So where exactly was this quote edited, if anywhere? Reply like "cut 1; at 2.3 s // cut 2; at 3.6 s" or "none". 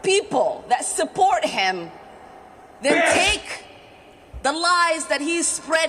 none